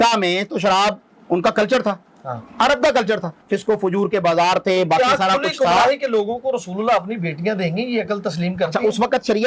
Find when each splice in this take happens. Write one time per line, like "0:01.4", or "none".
0:03.4